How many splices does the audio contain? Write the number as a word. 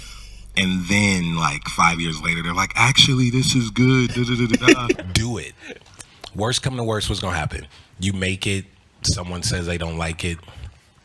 one